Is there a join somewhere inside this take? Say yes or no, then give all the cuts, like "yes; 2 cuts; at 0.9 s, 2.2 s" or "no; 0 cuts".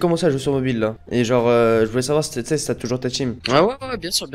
yes; 2 cuts; at 1.0 s, 3.4 s